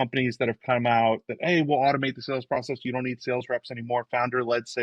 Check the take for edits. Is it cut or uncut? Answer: uncut